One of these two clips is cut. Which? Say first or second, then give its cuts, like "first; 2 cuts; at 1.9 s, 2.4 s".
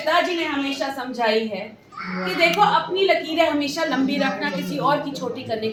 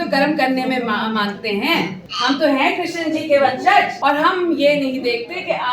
second; 2 cuts; at 2.0 s, 3.9 s